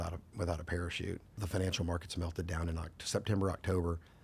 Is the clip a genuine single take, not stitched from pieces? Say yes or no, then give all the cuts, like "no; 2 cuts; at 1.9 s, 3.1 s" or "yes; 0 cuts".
no; 1 cut; at 1.4 s